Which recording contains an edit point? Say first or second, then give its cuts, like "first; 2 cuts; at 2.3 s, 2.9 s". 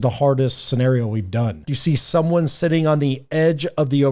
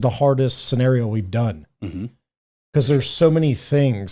first; 1 cut; at 1.7 s